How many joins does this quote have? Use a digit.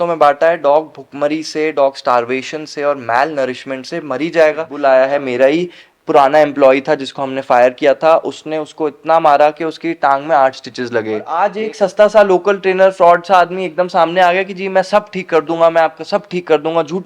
2